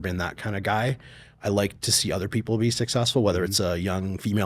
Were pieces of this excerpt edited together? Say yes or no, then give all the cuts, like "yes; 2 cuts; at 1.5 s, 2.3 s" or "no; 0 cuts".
no; 0 cuts